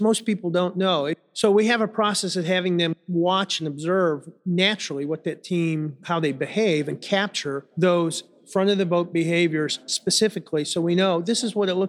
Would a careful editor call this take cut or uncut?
cut